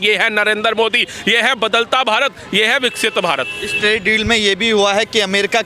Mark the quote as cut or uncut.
uncut